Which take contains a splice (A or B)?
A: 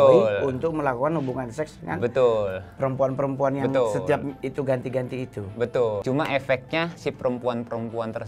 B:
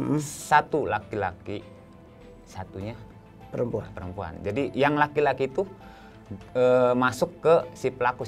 A